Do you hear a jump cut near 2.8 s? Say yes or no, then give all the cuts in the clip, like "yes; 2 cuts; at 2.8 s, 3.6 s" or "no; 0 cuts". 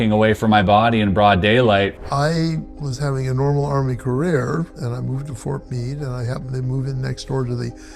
yes; 2 cuts; at 2.0 s, 2.8 s